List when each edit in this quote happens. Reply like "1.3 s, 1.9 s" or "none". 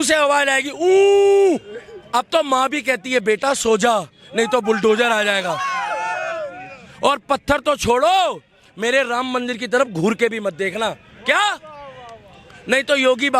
1.9 s